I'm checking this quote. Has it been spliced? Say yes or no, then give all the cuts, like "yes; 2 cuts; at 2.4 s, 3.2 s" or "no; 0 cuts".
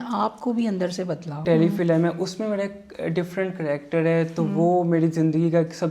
yes; 1 cut; at 1.4 s